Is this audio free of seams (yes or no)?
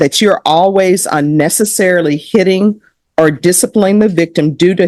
yes